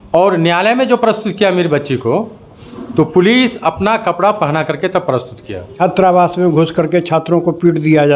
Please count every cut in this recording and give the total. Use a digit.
1